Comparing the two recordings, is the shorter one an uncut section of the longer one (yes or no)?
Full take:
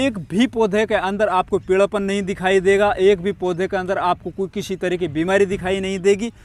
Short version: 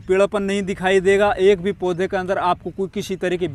yes